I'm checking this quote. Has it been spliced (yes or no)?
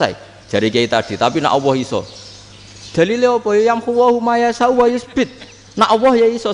no